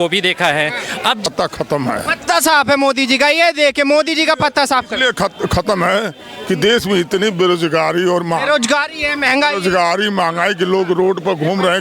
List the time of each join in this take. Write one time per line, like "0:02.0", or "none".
0:01.3